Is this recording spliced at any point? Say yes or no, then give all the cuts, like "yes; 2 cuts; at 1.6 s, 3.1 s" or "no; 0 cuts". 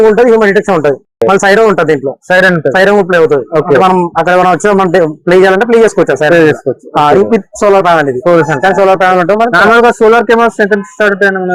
no; 0 cuts